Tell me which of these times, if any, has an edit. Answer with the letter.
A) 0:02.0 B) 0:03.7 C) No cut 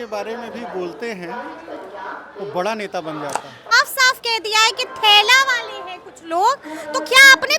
B